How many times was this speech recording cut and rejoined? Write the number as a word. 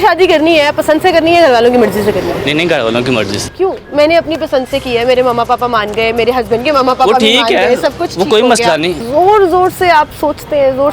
three